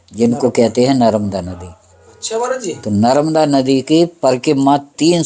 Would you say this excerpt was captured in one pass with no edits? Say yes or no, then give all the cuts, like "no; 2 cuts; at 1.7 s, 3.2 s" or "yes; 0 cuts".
yes; 0 cuts